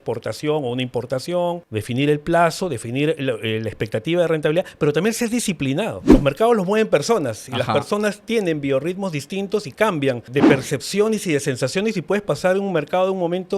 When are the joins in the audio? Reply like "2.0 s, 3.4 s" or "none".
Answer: 1.7 s, 6.0 s, 10.3 s